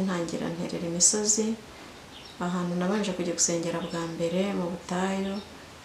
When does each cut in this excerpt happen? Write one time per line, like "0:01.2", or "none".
none